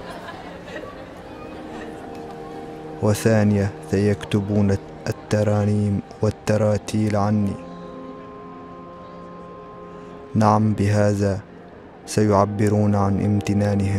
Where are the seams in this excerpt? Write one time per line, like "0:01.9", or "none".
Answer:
0:01.9